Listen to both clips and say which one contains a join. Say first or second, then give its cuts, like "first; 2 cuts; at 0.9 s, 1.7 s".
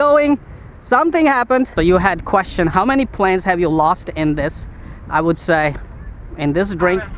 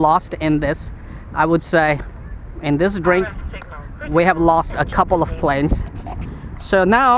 first; 1 cut; at 1.7 s